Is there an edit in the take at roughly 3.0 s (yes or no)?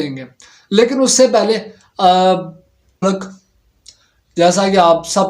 yes